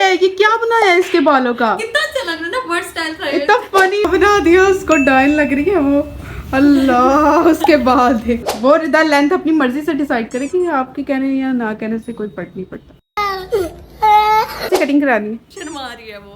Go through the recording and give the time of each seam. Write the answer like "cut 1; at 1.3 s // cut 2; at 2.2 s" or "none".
cut 1; at 4.1 s // cut 2; at 8.5 s // cut 3; at 14.7 s